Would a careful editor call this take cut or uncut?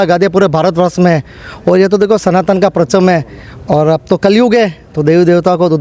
uncut